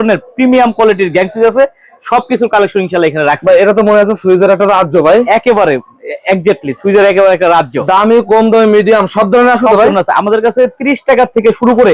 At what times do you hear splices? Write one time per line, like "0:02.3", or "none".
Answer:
none